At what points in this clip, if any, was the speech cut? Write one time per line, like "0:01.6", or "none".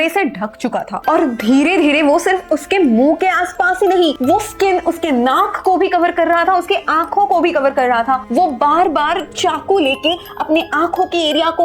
0:01.0